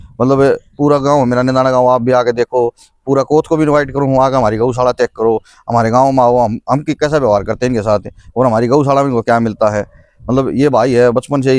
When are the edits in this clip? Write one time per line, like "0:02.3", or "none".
none